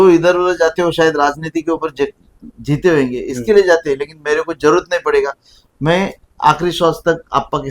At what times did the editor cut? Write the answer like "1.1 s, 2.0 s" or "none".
none

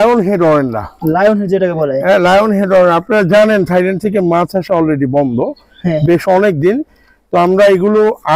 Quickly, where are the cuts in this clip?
none

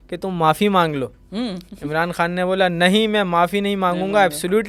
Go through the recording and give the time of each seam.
none

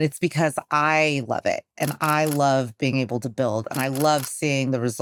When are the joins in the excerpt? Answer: none

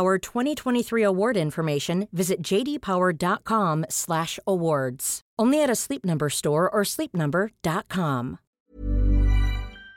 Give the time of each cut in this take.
8.7 s

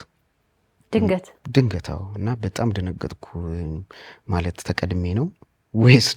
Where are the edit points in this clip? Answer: none

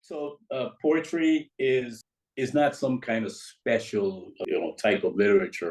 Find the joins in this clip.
2.0 s, 4.4 s

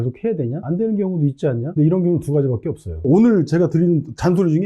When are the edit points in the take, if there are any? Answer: 1.7 s, 3.0 s

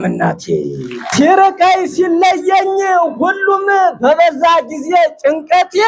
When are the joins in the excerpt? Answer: 1.1 s

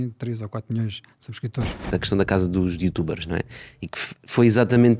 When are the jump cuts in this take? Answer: 1.9 s

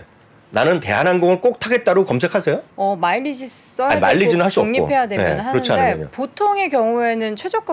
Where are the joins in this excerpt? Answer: 2.7 s

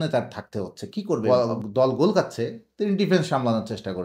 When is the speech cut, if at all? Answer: 1.2 s

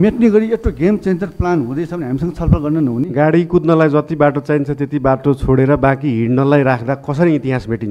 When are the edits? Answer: none

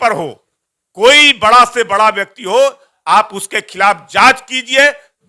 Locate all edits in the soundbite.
none

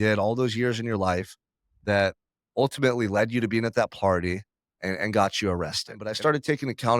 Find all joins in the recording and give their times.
6.1 s

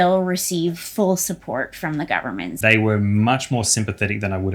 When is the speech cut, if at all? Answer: 2.5 s

